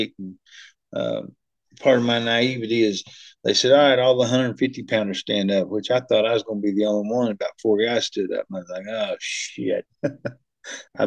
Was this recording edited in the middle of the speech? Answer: yes; 1 cut; at 9.9 s

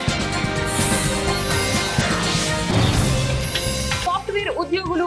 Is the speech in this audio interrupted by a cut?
yes; 1 cut; at 4.0 s

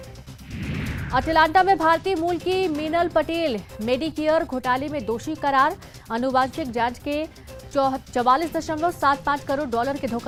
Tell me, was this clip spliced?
no; 0 cuts

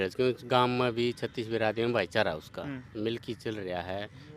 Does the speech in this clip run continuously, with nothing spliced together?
yes; 0 cuts

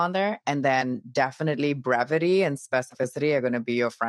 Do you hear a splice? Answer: no; 0 cuts

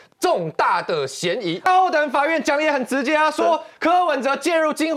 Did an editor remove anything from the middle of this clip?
yes; 1 cut; at 1.6 s

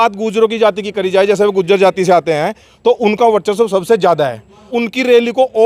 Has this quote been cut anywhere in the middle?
no; 0 cuts

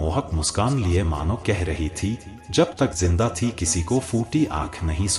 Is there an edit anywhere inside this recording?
no; 0 cuts

